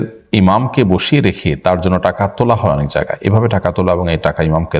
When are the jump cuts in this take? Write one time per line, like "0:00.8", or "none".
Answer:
none